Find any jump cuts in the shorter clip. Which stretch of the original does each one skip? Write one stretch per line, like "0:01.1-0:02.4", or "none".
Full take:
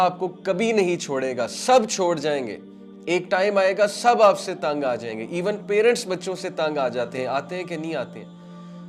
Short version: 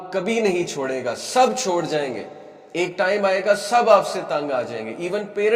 none